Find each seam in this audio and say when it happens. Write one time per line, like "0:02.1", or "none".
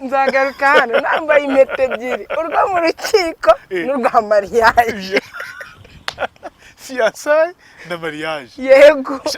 none